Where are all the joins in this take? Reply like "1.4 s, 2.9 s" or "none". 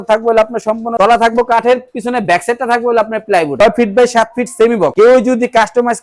0.9 s, 3.5 s, 4.9 s